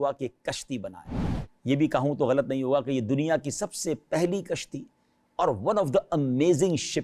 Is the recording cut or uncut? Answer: uncut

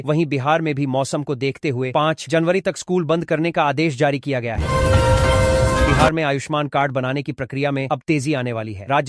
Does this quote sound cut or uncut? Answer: cut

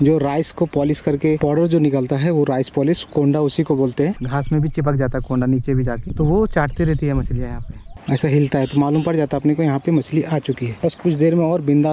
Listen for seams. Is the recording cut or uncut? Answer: cut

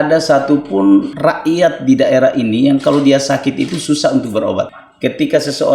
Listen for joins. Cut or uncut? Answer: cut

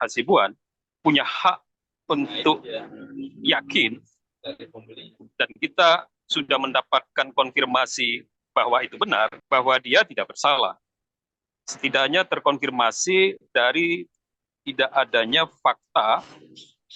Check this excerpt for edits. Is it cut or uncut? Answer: uncut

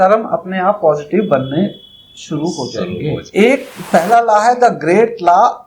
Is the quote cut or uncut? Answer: cut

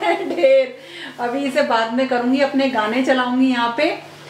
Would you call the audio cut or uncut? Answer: uncut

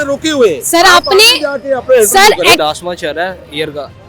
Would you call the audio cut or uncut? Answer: cut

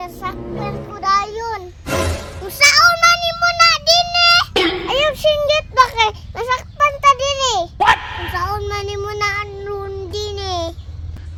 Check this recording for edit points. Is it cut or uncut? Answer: uncut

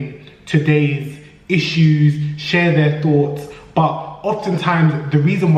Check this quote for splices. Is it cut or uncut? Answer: uncut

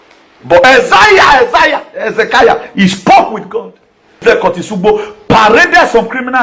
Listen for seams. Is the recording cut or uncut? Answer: cut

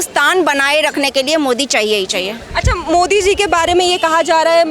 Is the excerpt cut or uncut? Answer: uncut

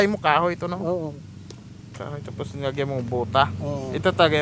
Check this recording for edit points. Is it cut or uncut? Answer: uncut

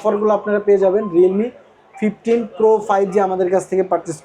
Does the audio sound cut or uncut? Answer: uncut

